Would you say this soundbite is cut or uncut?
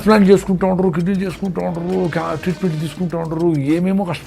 uncut